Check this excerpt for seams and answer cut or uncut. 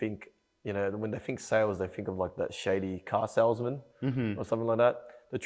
uncut